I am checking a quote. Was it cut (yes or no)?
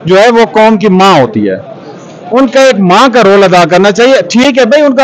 no